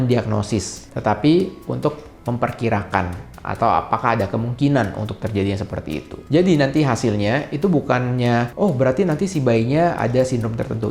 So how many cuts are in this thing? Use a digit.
0